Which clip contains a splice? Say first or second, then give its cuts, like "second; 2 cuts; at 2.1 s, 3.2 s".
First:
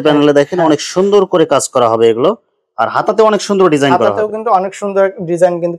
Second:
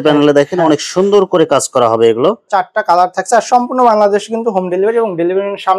second; 1 cut; at 2.4 s